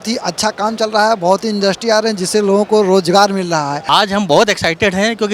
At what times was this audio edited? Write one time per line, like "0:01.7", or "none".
0:03.8